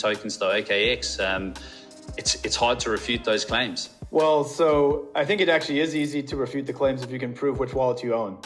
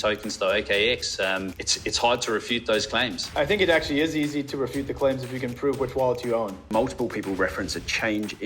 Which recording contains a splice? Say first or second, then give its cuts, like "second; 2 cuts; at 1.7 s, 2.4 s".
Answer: second; 3 cuts; at 1.6 s, 3.3 s, 6.6 s